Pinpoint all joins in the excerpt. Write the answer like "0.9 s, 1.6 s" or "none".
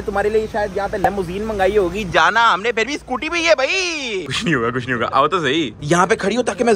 4.2 s